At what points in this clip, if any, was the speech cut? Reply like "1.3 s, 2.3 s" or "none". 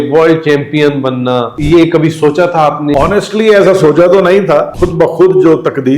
1.5 s, 2.9 s, 4.7 s